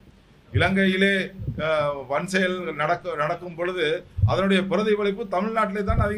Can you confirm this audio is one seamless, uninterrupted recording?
yes; 0 cuts

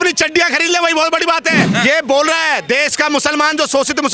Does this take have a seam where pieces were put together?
yes; 1 cut; at 1.7 s

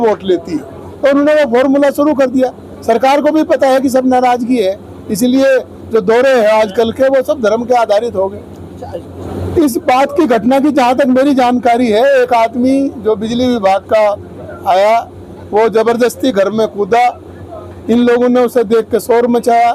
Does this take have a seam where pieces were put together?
yes; 1 cut; at 9.2 s

